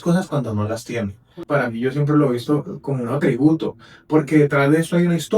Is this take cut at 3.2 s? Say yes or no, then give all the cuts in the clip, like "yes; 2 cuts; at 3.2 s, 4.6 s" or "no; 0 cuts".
no; 1 cut; at 1.4 s